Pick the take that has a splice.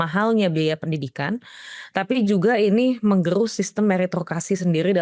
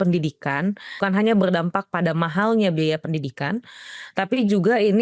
second; 1 cut; at 1.0 s

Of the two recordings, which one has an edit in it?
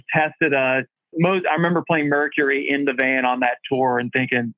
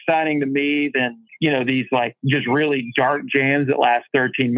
first; 1 cut; at 1.0 s

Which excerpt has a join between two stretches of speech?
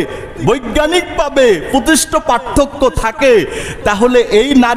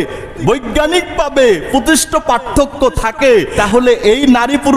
second; 1 cut; at 3.5 s

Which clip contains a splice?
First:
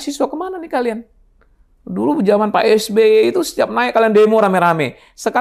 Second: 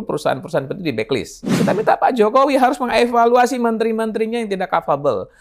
second; 1 cut; at 1.6 s

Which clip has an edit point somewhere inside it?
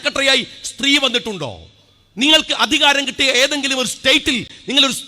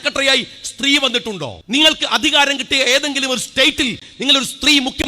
second; 1 cut; at 1.5 s

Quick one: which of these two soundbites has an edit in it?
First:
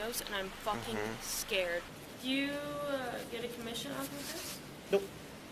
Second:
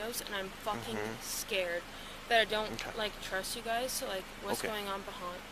first; 1 cut; at 2.0 s

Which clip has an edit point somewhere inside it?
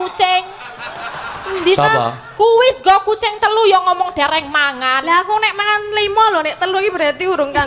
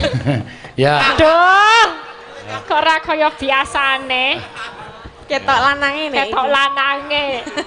second; 1 cut; at 1.1 s

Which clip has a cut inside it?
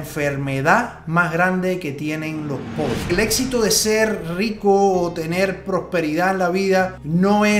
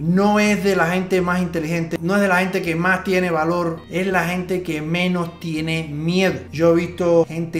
first; 1 cut; at 3.1 s

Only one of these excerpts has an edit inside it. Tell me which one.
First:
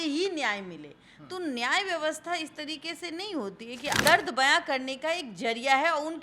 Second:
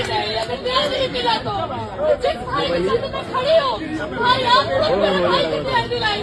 first; 1 cut; at 4.0 s

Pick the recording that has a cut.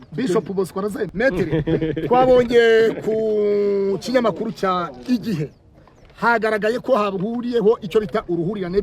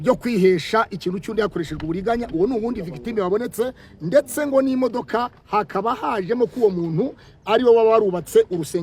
first; 1 cut; at 1.1 s

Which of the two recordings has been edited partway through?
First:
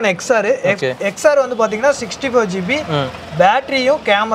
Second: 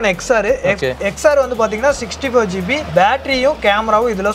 second; 1 cut; at 2.8 s

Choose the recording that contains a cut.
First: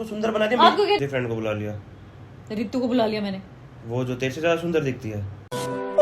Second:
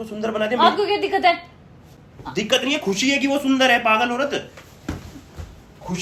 first; 1 cut; at 1.0 s

